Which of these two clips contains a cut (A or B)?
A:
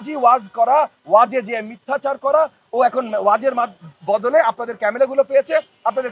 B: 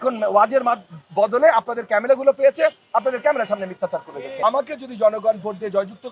B